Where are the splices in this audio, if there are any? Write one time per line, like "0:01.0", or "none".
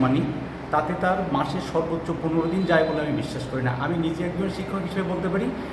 none